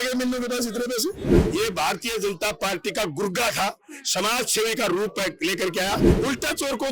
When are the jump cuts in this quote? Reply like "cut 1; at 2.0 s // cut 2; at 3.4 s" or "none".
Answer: cut 1; at 1.4 s // cut 2; at 6.1 s

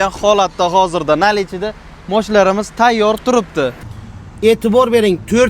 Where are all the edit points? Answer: cut 1; at 3.9 s

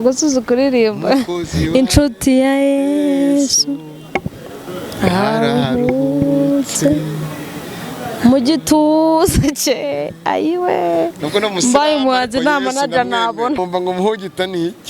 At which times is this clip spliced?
cut 1; at 13.6 s

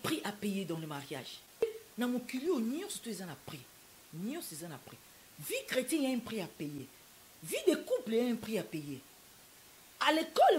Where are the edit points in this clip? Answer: cut 1; at 1.6 s

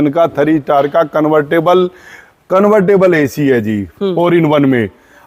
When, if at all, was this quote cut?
none

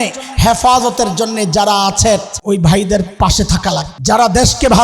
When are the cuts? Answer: cut 1; at 2.3 s // cut 2; at 3.9 s

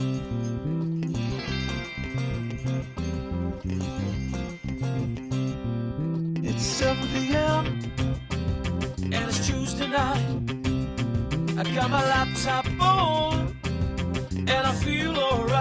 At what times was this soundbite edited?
cut 1; at 1.1 s

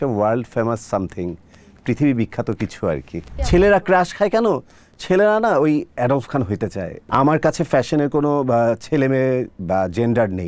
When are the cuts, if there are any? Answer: cut 1; at 3.5 s // cut 2; at 7.0 s

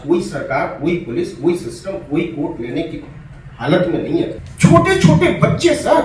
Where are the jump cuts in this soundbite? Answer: cut 1; at 4.4 s

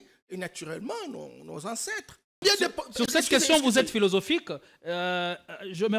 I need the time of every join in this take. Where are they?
cut 1; at 2.4 s

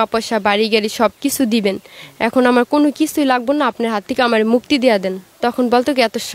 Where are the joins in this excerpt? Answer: none

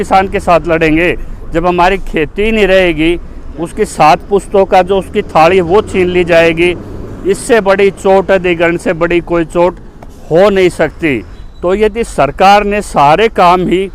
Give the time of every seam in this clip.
cut 1; at 11.4 s

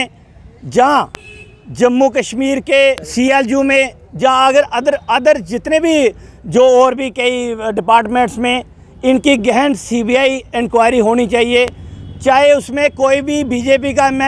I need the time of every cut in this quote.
cut 1; at 3.1 s

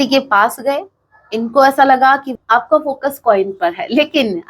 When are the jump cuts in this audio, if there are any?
cut 1; at 2.3 s

